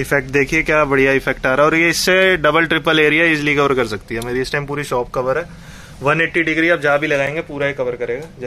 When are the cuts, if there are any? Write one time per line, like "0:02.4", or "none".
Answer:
none